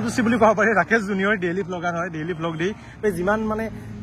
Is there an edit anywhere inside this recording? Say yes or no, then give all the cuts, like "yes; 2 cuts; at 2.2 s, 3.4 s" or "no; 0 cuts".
yes; 1 cut; at 3.0 s